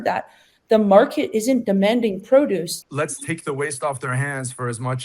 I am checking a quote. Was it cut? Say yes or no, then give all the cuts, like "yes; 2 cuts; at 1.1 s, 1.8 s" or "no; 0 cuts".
yes; 1 cut; at 2.7 s